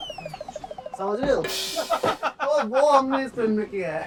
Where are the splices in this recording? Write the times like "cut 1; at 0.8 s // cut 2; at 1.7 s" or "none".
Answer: none